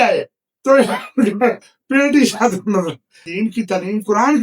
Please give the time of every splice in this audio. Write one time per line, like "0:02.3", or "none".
0:03.3